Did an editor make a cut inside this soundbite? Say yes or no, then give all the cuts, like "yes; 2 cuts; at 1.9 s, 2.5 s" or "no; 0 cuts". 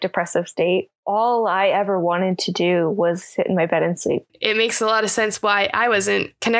yes; 2 cuts; at 0.9 s, 4.3 s